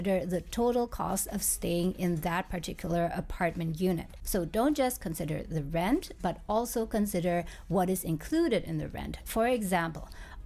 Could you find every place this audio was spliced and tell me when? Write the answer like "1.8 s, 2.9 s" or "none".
none